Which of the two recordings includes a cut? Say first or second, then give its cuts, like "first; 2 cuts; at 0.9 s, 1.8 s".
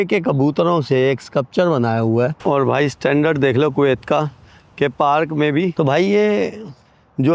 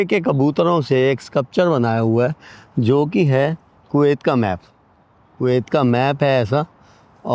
first; 2 cuts; at 2.4 s, 5.7 s